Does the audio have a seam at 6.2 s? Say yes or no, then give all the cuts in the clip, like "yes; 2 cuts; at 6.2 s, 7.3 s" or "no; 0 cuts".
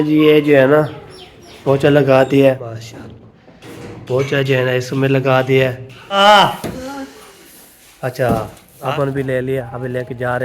yes; 3 cuts; at 2.6 s, 6.2 s, 8.7 s